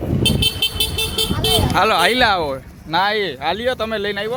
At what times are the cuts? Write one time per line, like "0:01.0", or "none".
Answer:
none